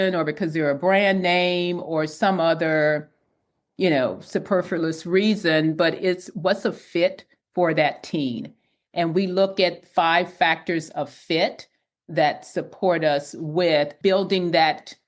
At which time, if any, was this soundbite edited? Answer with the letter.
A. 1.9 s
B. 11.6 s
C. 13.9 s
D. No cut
C